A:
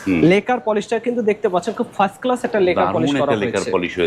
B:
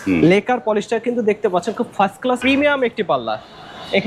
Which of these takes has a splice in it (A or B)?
B